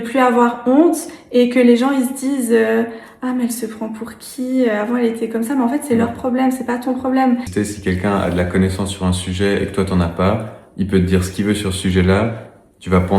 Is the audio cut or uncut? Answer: cut